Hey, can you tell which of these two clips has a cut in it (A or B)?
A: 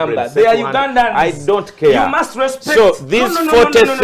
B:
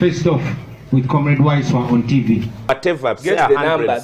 B